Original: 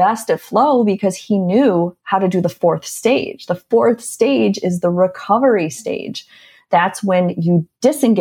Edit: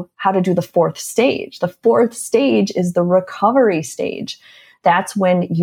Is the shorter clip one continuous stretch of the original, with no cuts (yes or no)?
yes